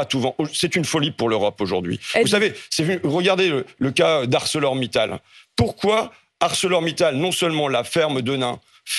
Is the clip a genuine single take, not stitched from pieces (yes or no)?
yes